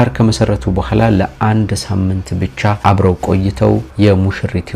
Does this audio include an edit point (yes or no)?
no